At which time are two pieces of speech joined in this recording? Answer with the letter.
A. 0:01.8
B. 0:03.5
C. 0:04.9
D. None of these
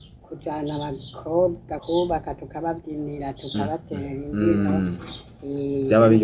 A